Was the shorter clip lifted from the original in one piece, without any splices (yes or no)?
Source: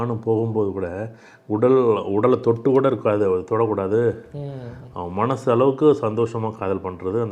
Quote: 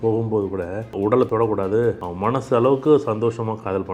no